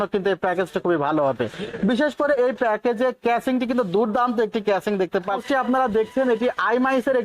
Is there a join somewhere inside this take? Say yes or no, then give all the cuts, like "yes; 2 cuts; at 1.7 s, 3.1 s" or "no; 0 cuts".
yes; 1 cut; at 5.4 s